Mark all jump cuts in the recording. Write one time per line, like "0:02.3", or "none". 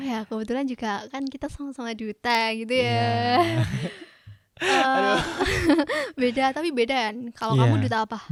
none